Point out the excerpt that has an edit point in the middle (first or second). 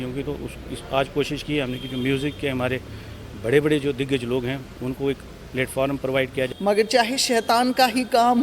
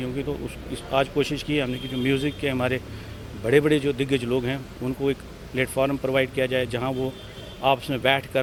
first